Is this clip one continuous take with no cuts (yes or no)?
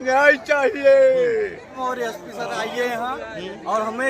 no